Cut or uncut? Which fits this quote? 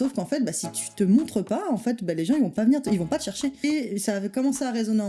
cut